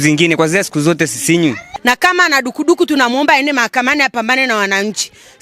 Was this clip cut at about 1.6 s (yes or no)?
yes